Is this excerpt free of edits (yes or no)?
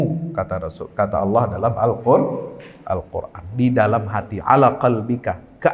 yes